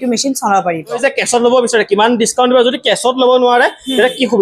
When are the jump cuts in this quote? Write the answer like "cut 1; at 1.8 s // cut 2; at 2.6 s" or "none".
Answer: cut 1; at 1.0 s